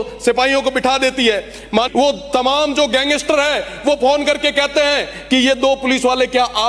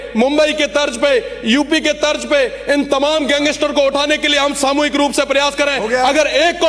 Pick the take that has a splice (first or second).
first